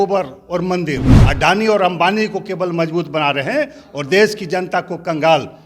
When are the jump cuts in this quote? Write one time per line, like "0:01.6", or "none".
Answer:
0:01.2